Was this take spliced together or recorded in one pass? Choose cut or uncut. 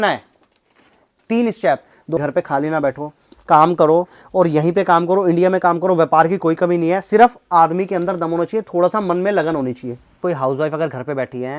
cut